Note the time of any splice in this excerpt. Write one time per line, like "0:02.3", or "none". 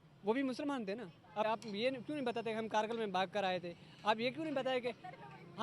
0:01.4